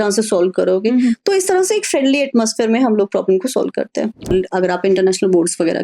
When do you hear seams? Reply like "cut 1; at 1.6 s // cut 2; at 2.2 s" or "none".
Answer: cut 1; at 4.3 s